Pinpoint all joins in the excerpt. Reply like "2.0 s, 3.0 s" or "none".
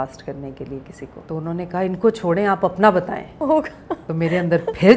1.1 s, 3.6 s